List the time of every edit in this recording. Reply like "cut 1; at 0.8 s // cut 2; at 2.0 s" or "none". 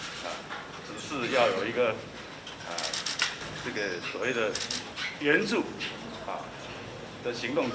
none